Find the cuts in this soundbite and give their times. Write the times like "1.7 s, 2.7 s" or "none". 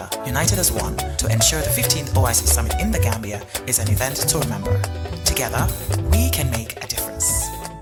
none